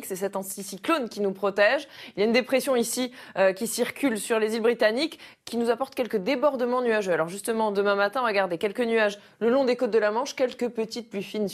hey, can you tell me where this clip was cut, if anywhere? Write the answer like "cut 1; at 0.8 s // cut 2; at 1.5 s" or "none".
none